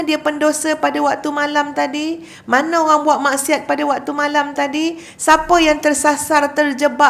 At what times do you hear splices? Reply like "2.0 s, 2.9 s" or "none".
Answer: none